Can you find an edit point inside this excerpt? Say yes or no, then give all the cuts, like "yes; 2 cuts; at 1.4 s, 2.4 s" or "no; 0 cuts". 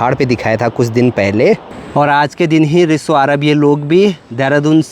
yes; 1 cut; at 1.7 s